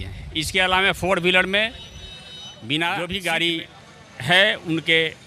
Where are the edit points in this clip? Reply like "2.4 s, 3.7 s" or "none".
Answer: 3.0 s